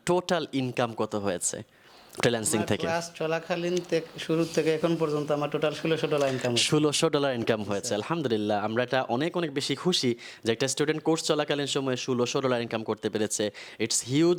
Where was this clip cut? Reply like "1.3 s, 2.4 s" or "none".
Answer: none